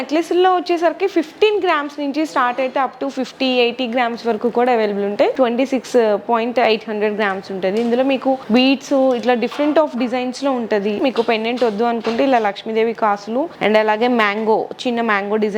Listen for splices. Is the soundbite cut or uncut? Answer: cut